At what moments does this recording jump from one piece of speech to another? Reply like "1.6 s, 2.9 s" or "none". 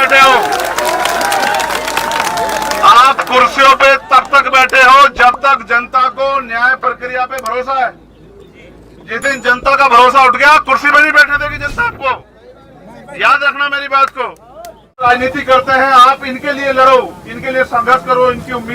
15.1 s